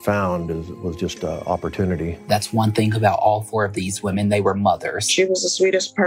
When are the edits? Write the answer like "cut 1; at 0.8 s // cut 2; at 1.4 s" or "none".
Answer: cut 1; at 2.1 s // cut 2; at 5.0 s